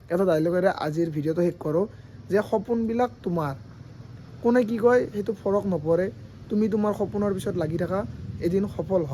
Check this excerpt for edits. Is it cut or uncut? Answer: uncut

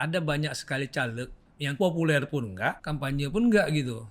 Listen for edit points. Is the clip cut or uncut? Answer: cut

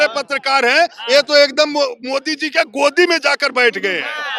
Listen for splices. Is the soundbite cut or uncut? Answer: uncut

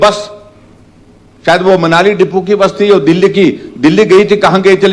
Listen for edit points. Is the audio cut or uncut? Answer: uncut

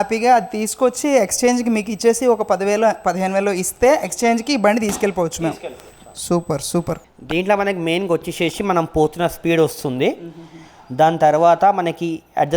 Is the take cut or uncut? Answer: uncut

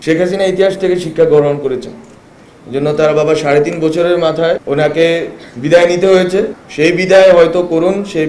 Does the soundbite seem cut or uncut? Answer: cut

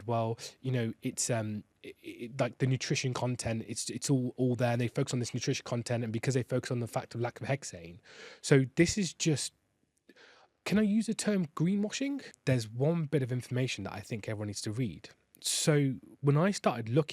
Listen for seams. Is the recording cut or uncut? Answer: cut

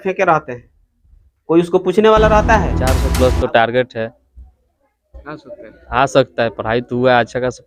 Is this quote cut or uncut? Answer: cut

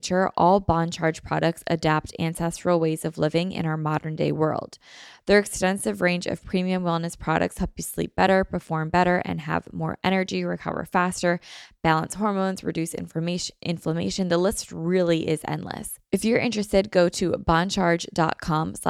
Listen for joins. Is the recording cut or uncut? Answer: cut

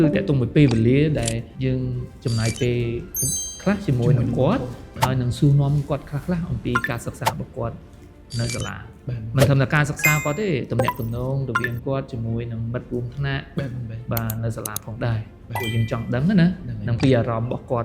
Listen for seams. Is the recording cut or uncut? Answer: cut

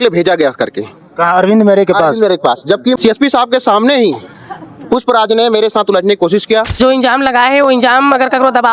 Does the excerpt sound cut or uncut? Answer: cut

